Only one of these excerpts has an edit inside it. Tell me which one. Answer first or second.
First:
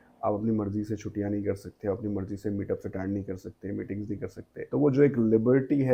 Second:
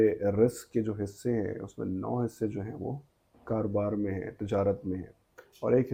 first